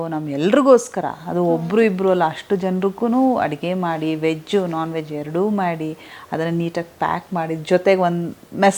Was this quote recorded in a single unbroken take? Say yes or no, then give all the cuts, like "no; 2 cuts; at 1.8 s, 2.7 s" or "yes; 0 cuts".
yes; 0 cuts